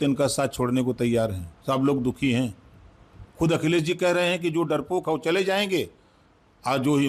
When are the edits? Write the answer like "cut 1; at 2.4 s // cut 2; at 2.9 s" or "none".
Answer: none